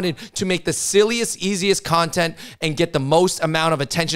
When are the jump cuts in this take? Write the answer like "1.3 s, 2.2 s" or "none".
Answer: none